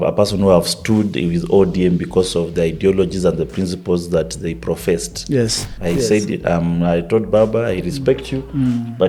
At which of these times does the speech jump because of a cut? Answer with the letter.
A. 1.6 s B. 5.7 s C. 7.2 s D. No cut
B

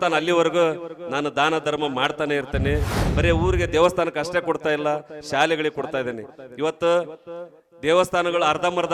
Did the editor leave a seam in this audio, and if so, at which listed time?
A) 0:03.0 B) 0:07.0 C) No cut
A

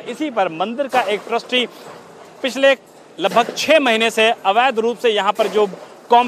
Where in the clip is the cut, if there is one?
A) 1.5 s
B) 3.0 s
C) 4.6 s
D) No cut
D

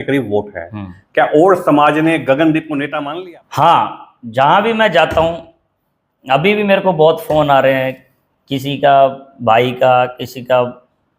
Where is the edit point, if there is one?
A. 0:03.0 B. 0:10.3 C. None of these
A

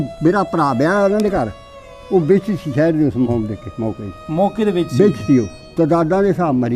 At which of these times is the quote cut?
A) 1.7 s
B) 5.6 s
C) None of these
B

